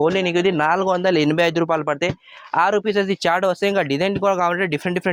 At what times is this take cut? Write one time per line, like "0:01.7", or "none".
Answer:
none